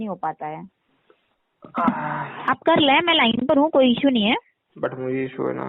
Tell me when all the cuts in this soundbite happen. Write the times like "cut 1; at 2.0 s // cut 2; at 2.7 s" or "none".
none